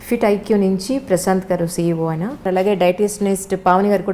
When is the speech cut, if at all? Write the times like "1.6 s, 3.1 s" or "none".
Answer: 2.5 s

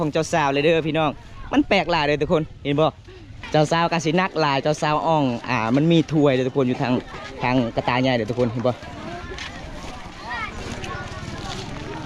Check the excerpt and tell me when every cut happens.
3.4 s, 8.9 s

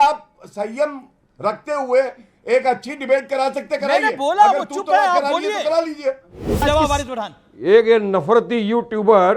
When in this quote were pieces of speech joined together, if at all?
6.6 s

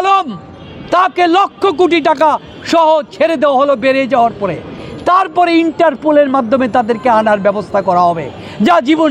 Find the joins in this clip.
none

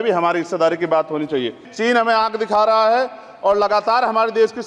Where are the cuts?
1.7 s

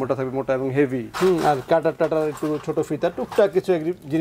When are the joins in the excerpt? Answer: 1.1 s

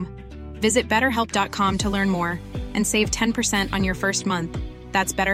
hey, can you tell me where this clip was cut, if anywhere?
none

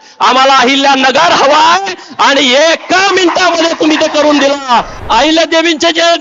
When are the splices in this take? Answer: 4.9 s

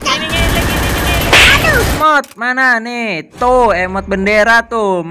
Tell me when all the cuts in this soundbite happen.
2.0 s

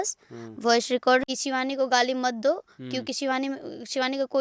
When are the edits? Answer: 1.2 s

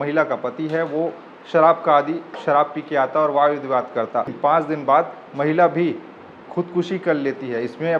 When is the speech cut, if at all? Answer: 4.3 s

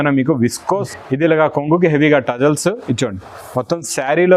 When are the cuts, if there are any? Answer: 0.9 s

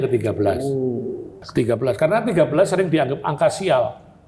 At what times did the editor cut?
1.4 s

